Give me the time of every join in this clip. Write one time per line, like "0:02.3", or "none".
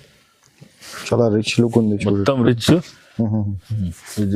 none

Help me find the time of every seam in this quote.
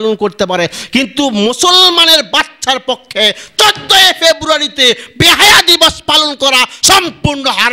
none

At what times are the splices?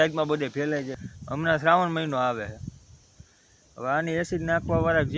0:00.9

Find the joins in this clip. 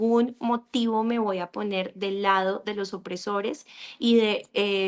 none

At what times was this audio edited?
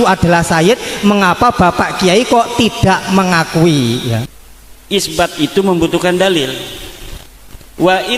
0:04.3

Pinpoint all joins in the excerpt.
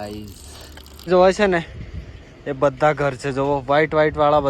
0:01.1

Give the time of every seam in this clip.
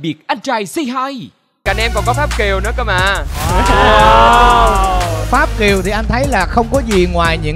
0:01.6

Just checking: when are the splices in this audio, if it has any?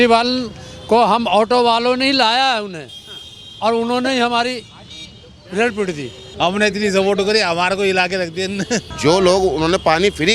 0:06.2
0:08.9

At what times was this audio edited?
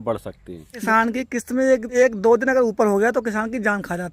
0:00.8
0:01.9

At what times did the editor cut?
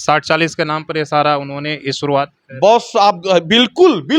none

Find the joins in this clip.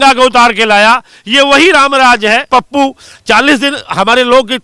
0:02.5

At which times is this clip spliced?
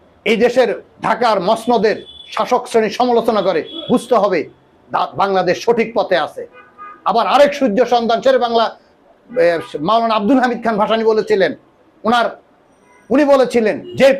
none

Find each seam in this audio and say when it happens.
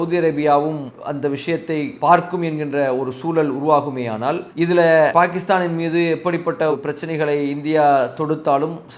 none

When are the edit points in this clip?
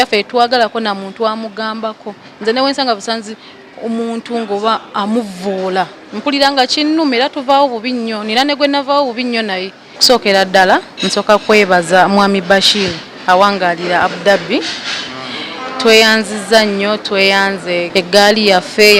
0:10.0
0:17.9

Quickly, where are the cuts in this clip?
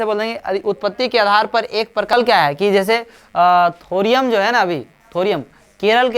0:02.1

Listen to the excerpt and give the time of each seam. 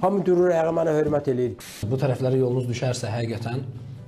0:01.8

